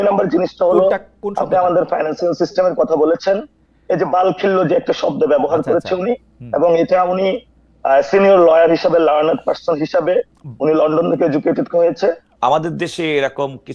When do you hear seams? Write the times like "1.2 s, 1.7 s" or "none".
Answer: 12.3 s